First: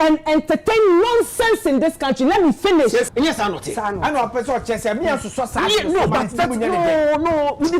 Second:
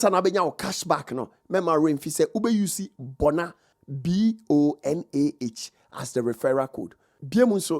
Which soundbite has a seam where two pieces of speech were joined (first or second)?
first